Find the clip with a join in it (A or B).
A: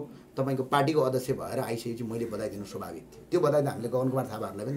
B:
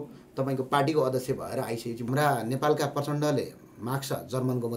B